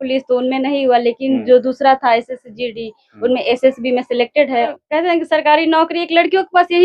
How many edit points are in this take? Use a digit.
1